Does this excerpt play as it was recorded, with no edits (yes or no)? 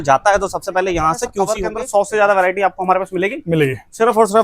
no